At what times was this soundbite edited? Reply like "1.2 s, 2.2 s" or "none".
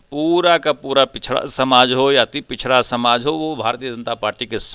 none